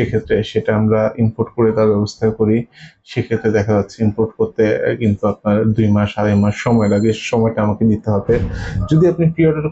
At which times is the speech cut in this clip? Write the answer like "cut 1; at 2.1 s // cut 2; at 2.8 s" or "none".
none

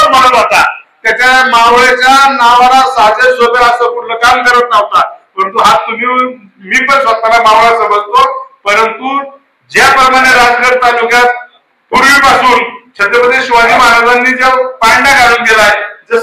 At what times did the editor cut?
none

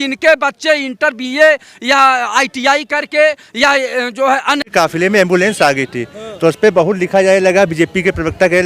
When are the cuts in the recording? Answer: cut 1; at 4.7 s

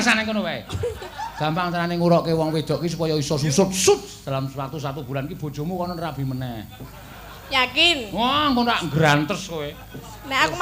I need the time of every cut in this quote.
none

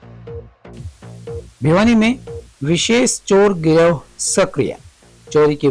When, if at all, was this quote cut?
cut 1; at 1.5 s

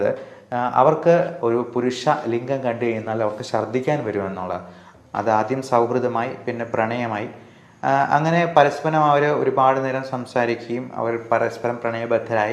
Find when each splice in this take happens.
cut 1; at 1.3 s // cut 2; at 4.8 s

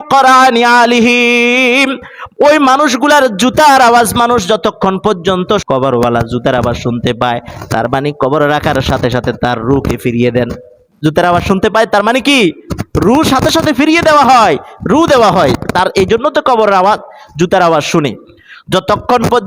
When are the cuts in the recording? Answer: cut 1; at 5.6 s

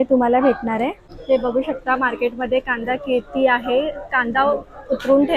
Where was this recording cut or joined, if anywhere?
cut 1; at 1.1 s

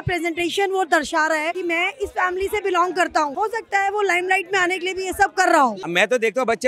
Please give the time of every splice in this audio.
cut 1; at 1.6 s // cut 2; at 3.3 s // cut 3; at 5.8 s

